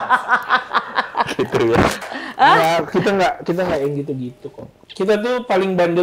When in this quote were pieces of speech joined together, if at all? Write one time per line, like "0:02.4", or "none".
none